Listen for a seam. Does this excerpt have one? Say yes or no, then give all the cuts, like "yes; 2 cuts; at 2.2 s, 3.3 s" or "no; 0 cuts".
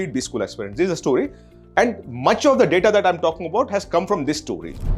no; 0 cuts